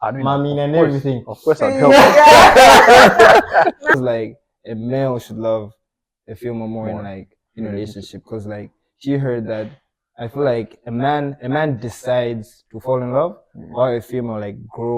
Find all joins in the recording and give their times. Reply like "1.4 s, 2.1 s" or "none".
3.9 s